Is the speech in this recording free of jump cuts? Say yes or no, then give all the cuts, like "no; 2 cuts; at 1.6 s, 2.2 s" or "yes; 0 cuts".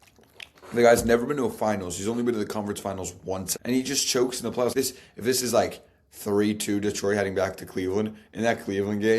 no; 2 cuts; at 3.5 s, 4.7 s